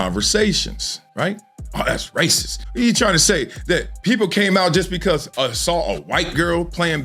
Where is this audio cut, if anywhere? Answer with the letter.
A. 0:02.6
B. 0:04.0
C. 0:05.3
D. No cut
A